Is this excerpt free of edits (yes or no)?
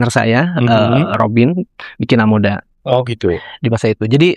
yes